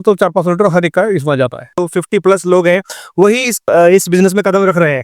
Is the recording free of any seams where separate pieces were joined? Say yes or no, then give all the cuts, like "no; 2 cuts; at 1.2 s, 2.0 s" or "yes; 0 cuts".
no; 2 cuts; at 1.9 s, 3.6 s